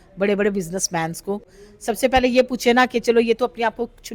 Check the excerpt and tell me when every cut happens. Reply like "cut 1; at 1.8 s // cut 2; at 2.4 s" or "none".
cut 1; at 1.6 s